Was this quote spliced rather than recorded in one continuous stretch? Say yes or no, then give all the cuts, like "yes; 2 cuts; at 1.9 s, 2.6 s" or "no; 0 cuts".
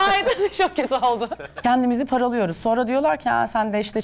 yes; 1 cut; at 1.4 s